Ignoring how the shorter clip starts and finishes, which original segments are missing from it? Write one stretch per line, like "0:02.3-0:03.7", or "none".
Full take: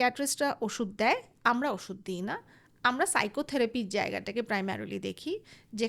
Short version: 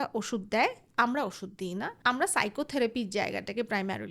0:02.4-0:02.7